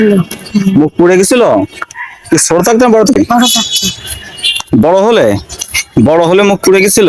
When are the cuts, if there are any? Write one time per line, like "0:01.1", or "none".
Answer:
none